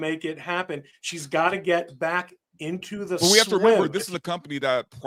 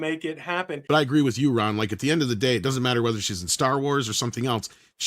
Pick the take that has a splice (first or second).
second